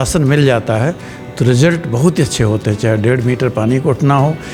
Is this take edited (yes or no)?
no